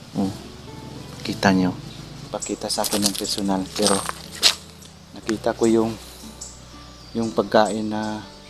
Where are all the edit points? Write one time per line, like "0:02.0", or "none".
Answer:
0:02.3